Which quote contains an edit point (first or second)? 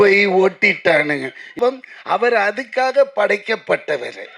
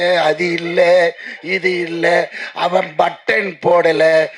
first